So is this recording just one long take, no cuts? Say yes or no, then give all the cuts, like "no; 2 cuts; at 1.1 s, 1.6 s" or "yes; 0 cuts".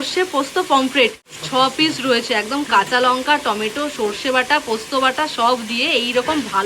yes; 0 cuts